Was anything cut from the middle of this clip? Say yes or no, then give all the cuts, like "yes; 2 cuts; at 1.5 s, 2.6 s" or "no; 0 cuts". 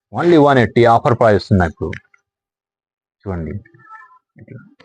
no; 0 cuts